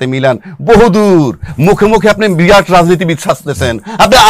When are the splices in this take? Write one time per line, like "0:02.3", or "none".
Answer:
none

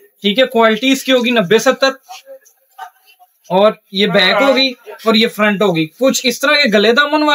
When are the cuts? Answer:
none

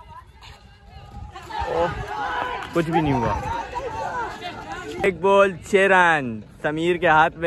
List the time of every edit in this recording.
0:05.0

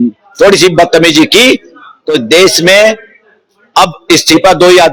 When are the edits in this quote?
none

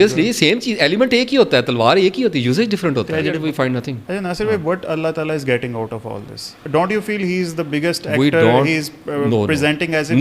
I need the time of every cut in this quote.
0:03.4
0:06.6

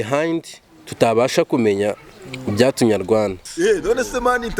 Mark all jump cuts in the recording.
0:03.5

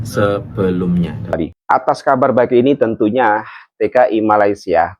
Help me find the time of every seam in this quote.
0:01.4

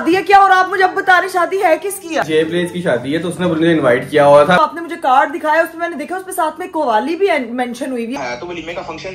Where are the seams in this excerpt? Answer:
0:02.2
0:04.6
0:08.1

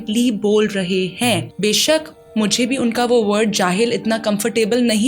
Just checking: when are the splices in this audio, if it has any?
0:01.5

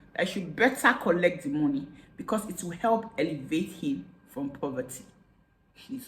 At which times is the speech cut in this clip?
none

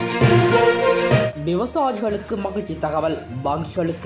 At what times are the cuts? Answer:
0:01.3

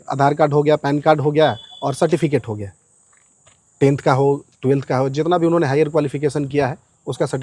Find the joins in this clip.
none

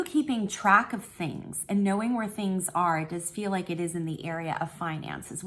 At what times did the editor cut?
none

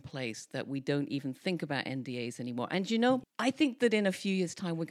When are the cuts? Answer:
0:03.3

